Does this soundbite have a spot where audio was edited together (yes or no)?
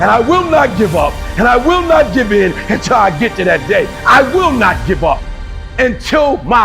yes